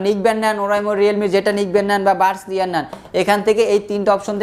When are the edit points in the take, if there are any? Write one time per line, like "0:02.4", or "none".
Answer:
none